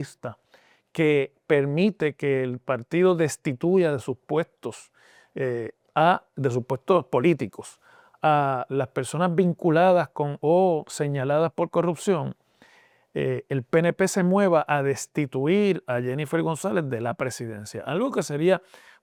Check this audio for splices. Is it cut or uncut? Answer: uncut